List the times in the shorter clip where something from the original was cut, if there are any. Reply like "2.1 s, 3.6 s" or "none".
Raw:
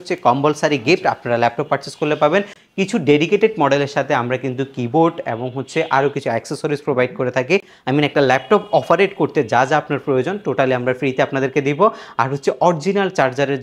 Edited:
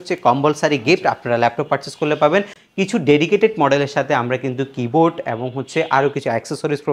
none